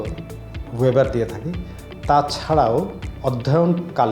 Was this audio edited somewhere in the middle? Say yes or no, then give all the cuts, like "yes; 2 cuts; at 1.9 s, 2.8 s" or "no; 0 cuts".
yes; 1 cut; at 3.0 s